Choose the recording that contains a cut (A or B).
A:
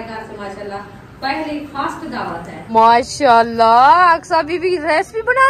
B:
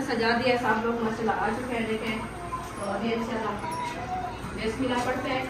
A